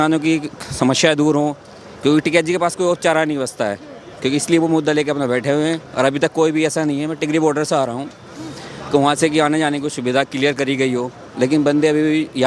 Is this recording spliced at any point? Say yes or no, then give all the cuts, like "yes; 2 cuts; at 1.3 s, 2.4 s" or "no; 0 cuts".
no; 0 cuts